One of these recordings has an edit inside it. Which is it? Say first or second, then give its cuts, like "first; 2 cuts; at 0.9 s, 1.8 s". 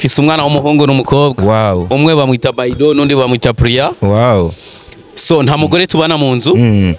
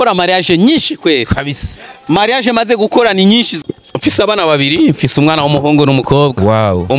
second; 1 cut; at 3.6 s